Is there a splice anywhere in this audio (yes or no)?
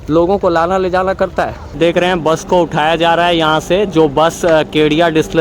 yes